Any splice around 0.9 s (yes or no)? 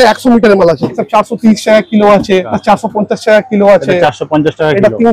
yes